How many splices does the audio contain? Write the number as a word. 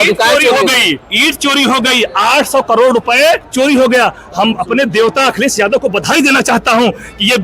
two